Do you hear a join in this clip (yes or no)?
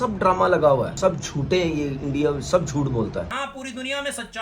yes